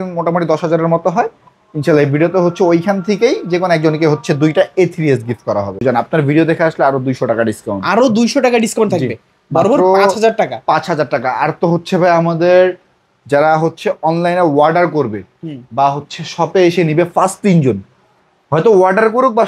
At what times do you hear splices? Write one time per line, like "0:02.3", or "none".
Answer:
0:05.8